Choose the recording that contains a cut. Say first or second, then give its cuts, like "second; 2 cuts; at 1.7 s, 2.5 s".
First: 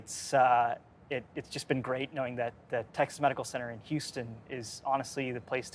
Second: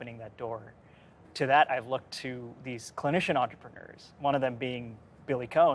second; 1 cut; at 1.3 s